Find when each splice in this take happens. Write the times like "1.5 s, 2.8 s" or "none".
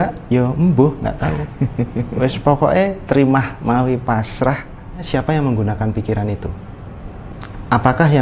5.0 s